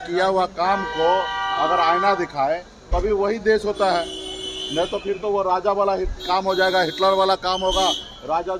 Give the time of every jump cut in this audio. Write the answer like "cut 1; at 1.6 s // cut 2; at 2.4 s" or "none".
none